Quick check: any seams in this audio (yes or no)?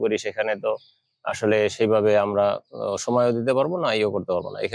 no